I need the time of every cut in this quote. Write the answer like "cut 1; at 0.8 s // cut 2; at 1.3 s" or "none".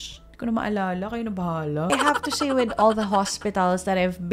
cut 1; at 1.9 s